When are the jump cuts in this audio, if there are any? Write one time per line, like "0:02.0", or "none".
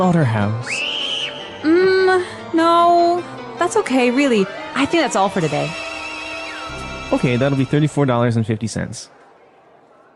0:06.7